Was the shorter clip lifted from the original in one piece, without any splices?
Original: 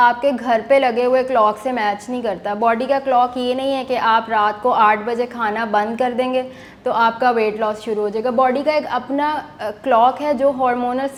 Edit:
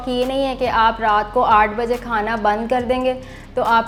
yes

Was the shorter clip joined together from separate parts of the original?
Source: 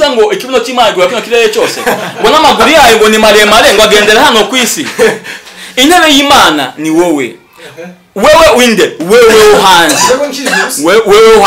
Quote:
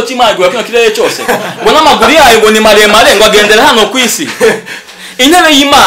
no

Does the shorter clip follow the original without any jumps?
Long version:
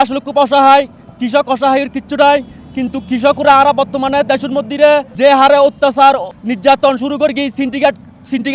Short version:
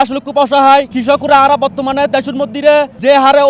no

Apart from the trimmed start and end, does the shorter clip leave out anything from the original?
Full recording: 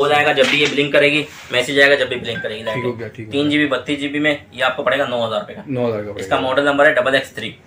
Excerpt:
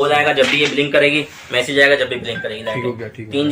no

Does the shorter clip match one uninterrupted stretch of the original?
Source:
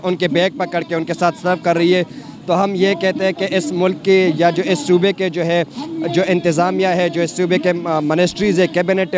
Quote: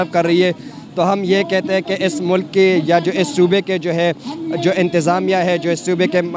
yes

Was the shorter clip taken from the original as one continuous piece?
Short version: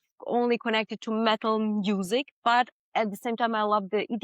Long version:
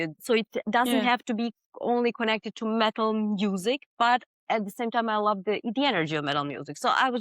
yes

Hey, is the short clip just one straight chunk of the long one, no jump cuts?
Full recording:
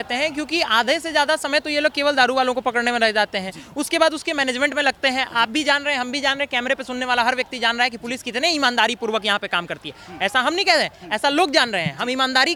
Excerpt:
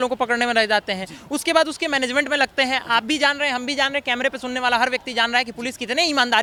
yes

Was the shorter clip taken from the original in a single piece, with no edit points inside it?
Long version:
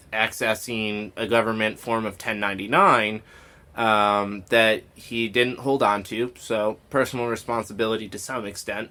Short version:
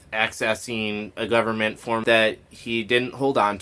no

